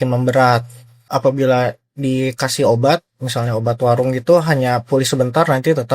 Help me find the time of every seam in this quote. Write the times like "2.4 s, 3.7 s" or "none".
1.0 s